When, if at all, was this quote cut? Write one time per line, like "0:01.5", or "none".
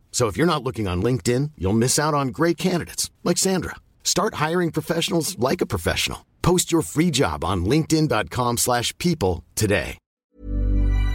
0:10.2